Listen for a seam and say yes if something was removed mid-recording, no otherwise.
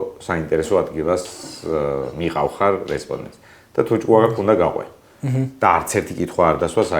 no